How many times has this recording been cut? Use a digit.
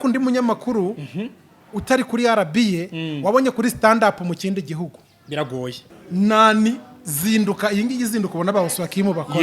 1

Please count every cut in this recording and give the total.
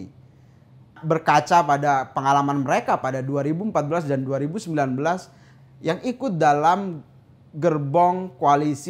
1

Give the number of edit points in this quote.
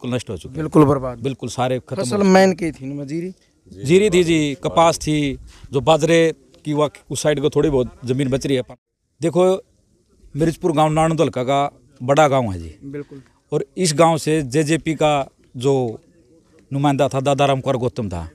1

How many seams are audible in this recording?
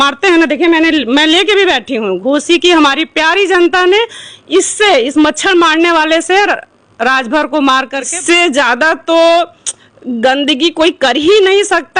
1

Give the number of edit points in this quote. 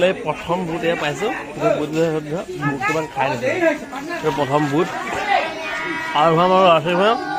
0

